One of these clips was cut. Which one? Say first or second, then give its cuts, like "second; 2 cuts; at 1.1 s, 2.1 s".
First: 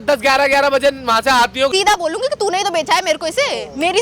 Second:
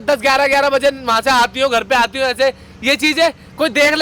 first; 1 cut; at 1.7 s